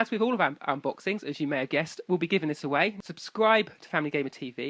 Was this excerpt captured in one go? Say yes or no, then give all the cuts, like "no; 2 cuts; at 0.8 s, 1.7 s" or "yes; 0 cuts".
no; 1 cut; at 3.0 s